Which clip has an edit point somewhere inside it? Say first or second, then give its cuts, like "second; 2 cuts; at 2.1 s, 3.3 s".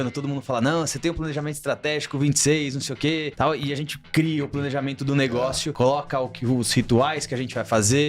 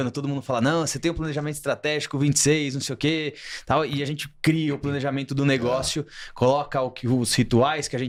first; 2 cuts; at 3.3 s, 5.7 s